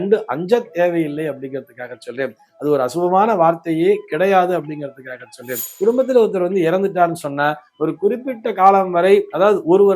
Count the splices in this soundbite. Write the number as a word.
one